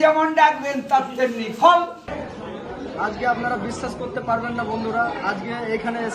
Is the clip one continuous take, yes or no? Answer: no